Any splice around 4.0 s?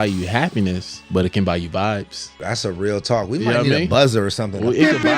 no; 2 cuts; at 0.9 s, 2.3 s

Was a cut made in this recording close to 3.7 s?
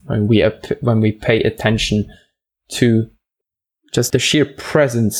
yes; 1 cut; at 3.7 s

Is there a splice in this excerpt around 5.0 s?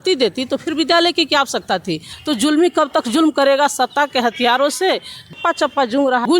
no; 1 cut; at 2.1 s

